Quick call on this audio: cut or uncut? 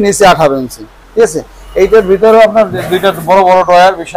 uncut